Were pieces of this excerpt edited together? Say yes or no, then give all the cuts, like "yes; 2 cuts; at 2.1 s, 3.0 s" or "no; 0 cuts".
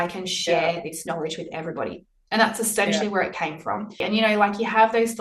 yes; 1 cut; at 4.0 s